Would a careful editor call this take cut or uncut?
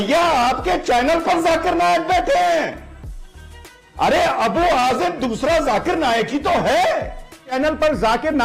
cut